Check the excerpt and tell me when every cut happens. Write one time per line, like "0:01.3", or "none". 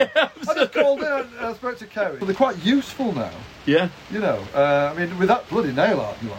0:02.2